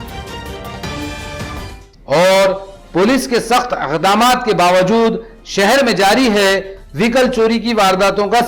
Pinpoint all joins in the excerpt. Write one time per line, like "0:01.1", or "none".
0:01.7